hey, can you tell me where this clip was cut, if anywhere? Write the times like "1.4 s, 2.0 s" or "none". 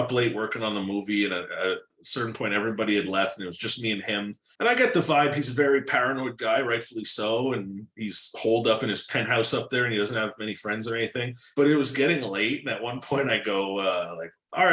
4.4 s, 11.4 s